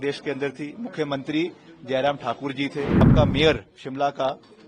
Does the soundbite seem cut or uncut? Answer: cut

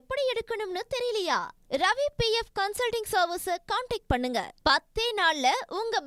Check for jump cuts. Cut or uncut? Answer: uncut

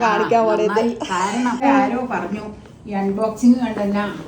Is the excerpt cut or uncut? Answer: cut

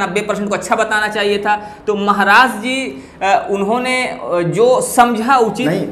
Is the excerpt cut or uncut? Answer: uncut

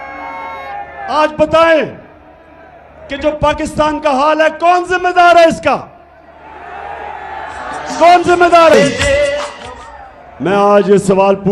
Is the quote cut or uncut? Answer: uncut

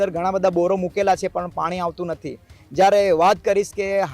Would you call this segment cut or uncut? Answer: uncut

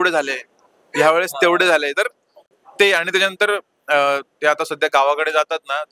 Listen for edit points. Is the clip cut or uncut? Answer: uncut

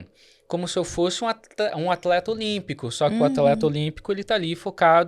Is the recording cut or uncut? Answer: uncut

